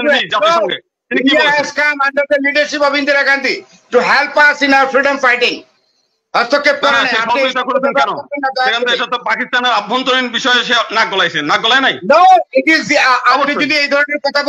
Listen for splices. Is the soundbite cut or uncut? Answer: uncut